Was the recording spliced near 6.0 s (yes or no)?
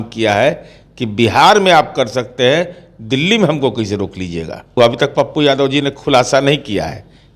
no